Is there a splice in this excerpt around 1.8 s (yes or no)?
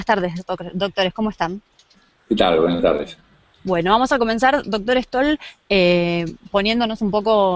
yes